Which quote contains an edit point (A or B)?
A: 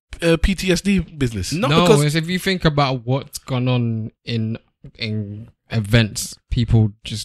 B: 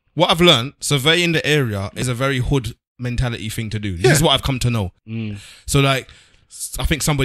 B